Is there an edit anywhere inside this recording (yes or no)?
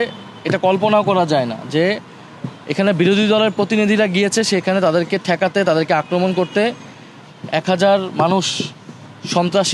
no